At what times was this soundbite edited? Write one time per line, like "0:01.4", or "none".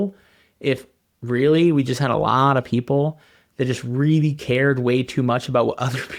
none